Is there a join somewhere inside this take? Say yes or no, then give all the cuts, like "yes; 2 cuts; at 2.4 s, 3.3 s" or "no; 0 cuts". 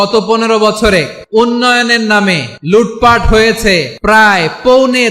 yes; 3 cuts; at 1.2 s, 2.5 s, 3.9 s